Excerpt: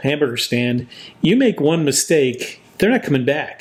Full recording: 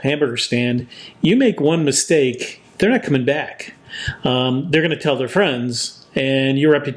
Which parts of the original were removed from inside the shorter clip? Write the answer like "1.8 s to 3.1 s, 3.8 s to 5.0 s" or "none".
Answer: none